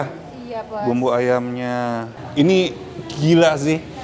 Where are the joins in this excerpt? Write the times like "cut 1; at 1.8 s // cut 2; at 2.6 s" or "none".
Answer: cut 1; at 2.1 s